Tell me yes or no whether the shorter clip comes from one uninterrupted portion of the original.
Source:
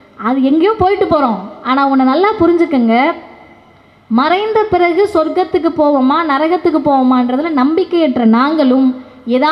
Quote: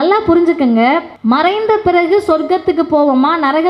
no